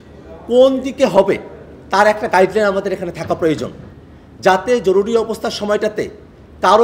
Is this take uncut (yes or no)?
yes